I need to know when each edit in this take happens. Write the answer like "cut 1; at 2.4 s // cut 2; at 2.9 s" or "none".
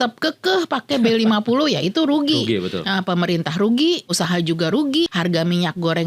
cut 1; at 4.1 s // cut 2; at 5.1 s